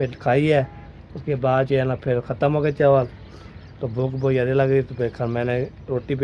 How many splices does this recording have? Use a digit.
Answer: 0